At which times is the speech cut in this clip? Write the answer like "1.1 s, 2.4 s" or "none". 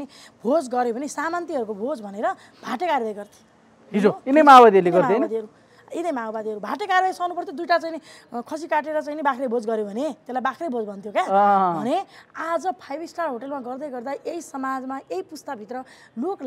none